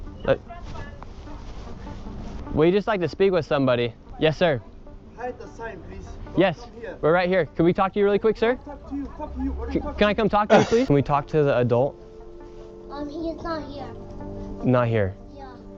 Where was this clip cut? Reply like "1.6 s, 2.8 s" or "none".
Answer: 10.9 s